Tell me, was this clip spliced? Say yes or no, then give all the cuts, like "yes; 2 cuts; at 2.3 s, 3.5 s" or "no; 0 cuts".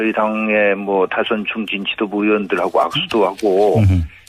yes; 1 cut; at 3.0 s